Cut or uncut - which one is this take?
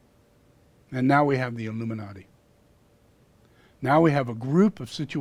uncut